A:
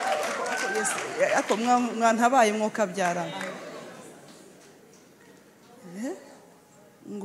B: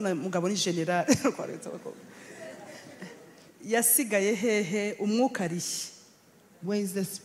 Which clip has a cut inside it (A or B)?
B